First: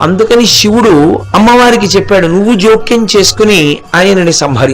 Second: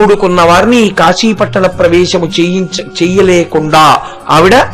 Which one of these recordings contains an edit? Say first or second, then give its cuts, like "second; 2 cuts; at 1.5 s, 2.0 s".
first; 1 cut; at 1.2 s